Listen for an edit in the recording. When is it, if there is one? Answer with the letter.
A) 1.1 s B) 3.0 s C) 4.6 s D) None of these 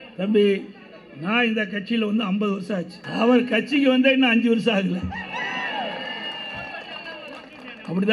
B